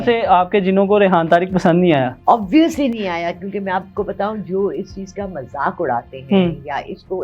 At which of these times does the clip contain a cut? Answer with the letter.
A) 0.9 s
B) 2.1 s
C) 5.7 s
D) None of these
B